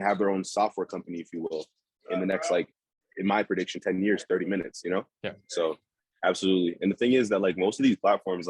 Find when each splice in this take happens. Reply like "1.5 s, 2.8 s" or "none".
5.9 s